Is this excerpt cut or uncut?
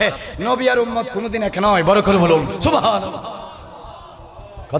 uncut